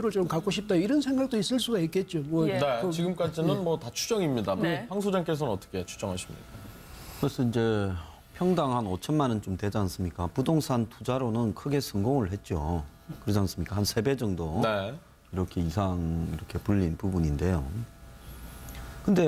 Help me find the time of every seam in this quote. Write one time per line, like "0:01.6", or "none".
0:09.0